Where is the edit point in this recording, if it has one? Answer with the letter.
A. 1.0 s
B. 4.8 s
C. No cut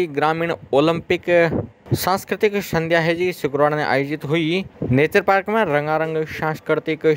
B